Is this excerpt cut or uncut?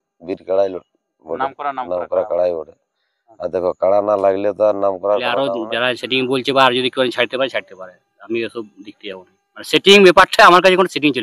cut